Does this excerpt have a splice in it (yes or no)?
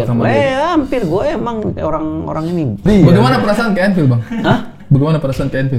yes